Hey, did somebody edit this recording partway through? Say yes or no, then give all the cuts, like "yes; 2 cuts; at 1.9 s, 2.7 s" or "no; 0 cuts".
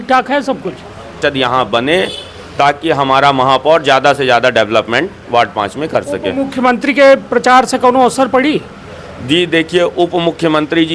yes; 1 cut; at 1.2 s